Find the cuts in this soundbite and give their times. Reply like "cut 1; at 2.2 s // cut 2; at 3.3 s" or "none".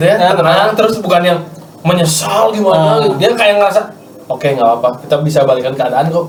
none